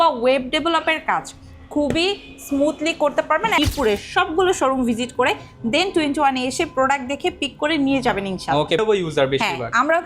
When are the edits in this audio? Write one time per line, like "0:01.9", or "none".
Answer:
0:03.6
0:08.8